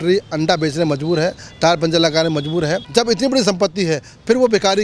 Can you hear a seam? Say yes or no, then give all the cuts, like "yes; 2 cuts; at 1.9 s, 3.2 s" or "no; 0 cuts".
yes; 1 cut; at 2.8 s